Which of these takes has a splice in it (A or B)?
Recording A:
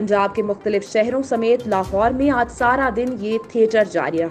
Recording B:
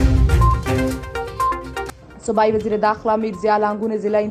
B